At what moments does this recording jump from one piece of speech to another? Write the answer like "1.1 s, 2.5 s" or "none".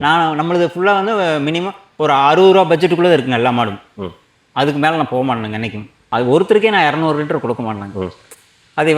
6.0 s